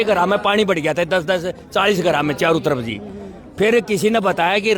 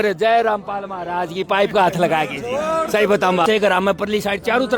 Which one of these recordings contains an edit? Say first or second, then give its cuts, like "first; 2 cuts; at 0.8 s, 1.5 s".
second; 1 cut; at 3.4 s